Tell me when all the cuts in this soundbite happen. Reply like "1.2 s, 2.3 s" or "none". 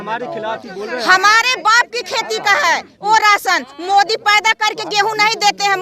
none